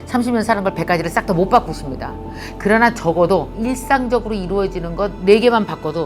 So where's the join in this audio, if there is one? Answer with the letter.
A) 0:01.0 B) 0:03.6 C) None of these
B